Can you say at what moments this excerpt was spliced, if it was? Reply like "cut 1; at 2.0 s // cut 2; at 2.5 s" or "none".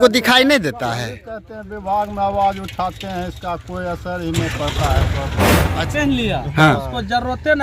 cut 1; at 5.8 s

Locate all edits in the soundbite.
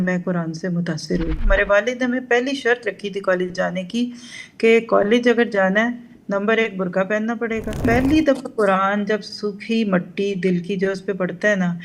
cut 1; at 1.4 s // cut 2; at 7.9 s

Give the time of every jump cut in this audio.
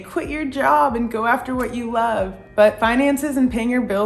none

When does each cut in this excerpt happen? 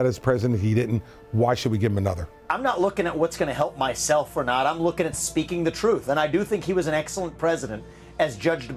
cut 1; at 2.4 s

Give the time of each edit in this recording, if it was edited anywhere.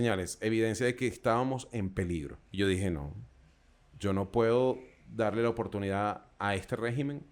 cut 1; at 2.4 s

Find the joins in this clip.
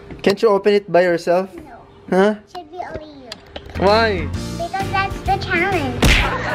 none

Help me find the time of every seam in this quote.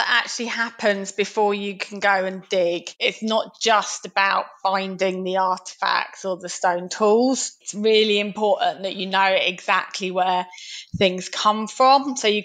cut 1; at 3.1 s

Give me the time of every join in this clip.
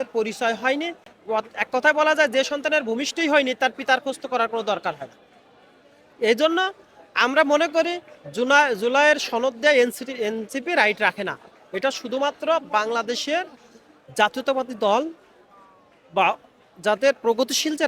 none

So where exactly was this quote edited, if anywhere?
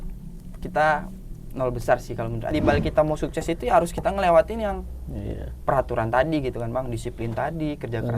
cut 1; at 2.5 s

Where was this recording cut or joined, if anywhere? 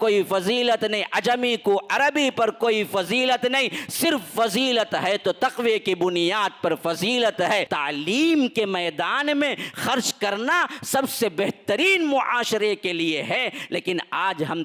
cut 1; at 7.7 s

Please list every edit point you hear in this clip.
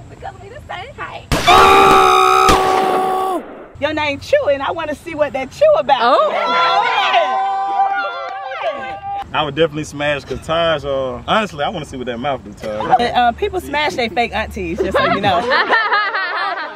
cut 1; at 3.6 s // cut 2; at 9.2 s // cut 3; at 11.2 s // cut 4; at 13.0 s

